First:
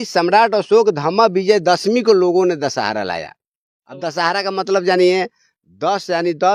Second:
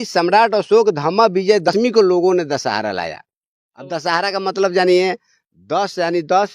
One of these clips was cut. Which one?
second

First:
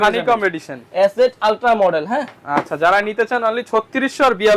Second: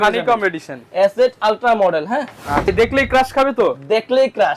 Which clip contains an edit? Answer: second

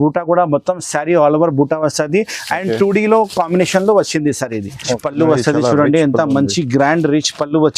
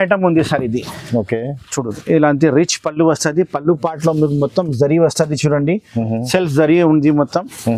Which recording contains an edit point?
first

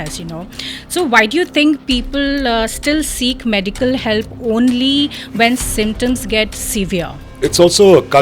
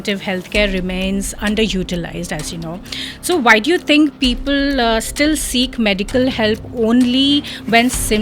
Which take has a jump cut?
first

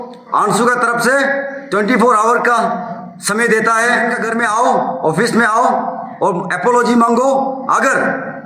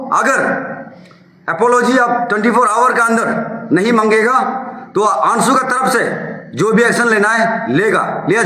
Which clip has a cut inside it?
first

